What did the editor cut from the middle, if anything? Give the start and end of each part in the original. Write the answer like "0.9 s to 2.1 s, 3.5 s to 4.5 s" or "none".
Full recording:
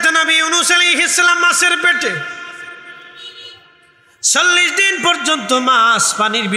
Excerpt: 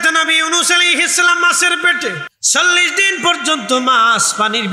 2.3 s to 4.1 s